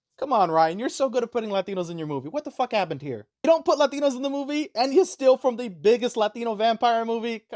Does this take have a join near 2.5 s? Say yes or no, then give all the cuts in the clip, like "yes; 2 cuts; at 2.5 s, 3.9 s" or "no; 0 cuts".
no; 0 cuts